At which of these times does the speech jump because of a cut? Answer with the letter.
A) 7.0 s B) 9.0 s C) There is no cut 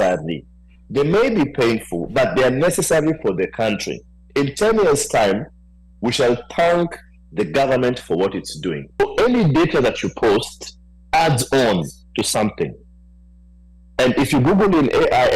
B